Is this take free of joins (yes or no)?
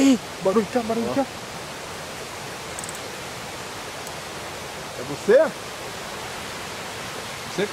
no